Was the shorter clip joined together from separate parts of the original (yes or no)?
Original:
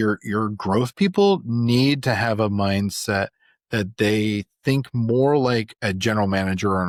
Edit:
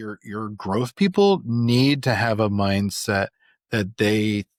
no